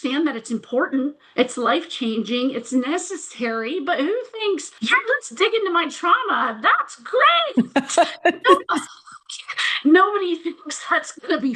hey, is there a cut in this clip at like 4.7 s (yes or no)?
yes